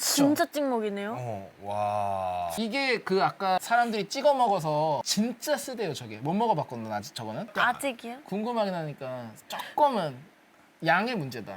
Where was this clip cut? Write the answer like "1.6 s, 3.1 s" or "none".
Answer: 2.5 s